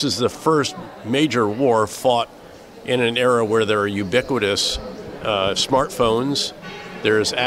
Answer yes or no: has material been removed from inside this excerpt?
no